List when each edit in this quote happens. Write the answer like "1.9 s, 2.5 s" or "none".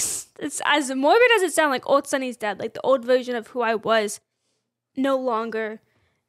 none

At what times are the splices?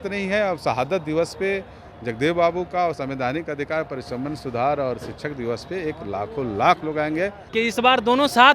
7.4 s

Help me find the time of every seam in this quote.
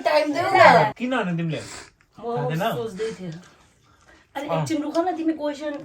none

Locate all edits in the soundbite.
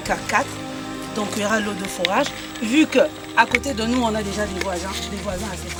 none

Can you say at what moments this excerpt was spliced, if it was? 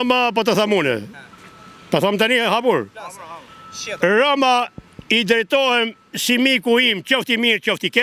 none

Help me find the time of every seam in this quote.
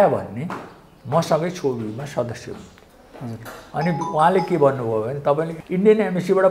5.6 s

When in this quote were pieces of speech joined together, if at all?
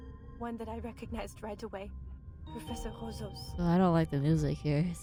none

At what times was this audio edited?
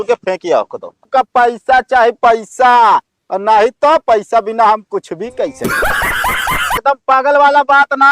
1.0 s, 6.7 s

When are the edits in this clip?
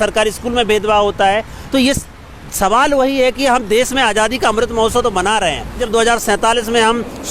5.8 s

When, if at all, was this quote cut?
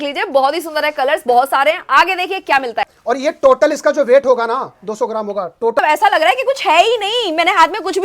2.8 s, 5.8 s

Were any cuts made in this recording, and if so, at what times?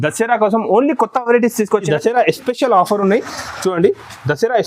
1.9 s

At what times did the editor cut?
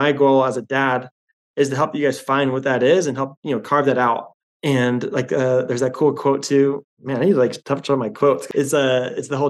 7.0 s, 8.4 s

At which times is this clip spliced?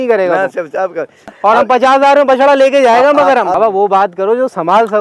1.3 s, 3.5 s

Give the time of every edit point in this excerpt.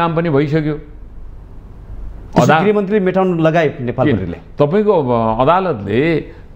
none

